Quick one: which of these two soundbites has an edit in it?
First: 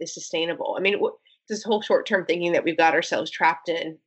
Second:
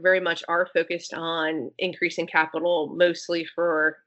first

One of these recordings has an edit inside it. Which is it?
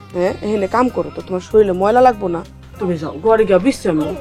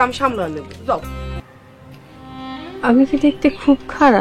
second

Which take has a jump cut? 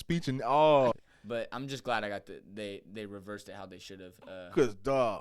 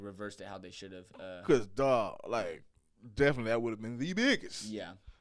first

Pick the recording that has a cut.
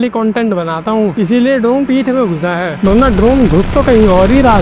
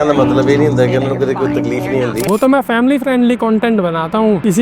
second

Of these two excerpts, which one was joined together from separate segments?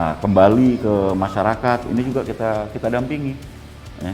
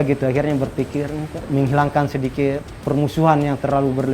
second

